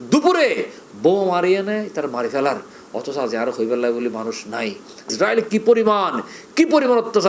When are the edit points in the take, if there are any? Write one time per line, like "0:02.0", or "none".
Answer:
none